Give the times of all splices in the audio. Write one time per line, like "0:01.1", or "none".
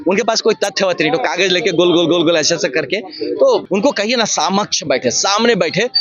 0:03.6